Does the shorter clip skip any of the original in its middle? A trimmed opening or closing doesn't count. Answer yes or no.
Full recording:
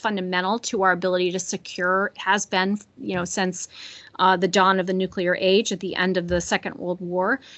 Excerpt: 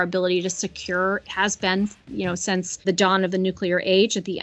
yes